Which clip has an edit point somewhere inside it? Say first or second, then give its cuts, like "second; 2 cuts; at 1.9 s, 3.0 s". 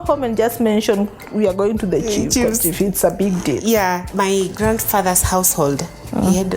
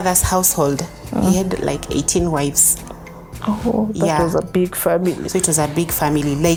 first; 1 cut; at 4.1 s